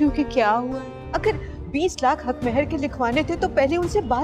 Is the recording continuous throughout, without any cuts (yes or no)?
no